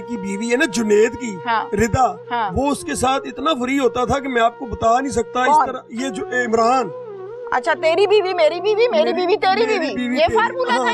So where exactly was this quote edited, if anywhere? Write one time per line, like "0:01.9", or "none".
none